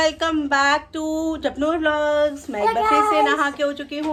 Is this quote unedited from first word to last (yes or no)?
yes